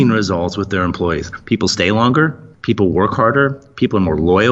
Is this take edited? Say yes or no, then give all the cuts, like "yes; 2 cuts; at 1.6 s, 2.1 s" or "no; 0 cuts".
yes; 1 cut; at 2.5 s